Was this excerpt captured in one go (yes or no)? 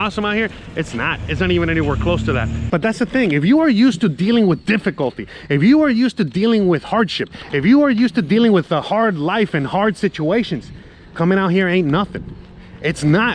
no